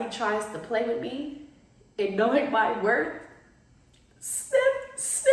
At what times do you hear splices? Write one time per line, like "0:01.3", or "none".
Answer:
none

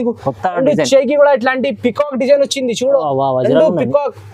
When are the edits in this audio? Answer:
none

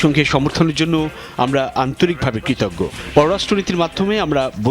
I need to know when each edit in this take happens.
none

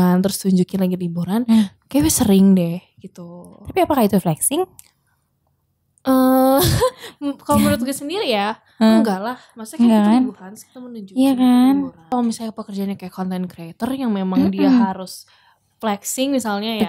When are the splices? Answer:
0:12.1

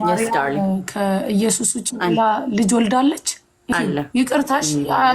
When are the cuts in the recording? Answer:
0:03.7

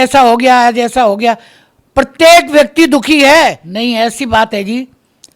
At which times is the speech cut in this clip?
0:03.7

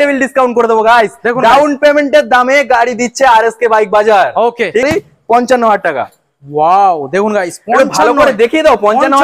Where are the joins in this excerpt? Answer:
0:04.8

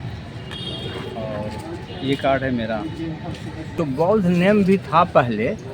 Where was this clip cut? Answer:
0:03.7

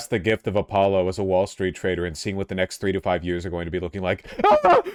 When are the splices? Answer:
none

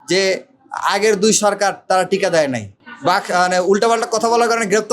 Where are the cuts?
0:02.7

